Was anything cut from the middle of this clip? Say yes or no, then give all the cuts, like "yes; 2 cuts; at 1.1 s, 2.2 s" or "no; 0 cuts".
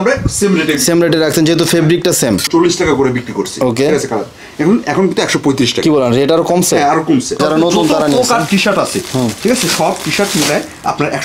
yes; 2 cuts; at 2.5 s, 7.4 s